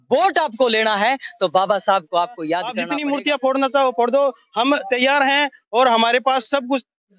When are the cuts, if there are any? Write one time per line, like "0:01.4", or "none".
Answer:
0:02.8